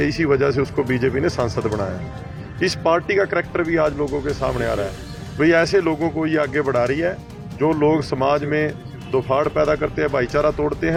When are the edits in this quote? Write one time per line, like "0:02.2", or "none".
none